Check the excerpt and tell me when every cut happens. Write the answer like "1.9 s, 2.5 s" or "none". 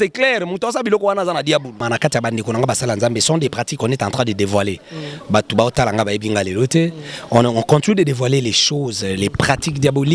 1.8 s